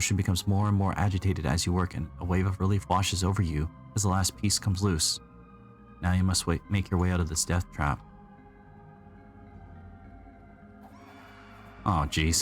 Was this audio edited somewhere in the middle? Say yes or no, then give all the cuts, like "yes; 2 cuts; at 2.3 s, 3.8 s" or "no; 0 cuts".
yes; 1 cut; at 10.0 s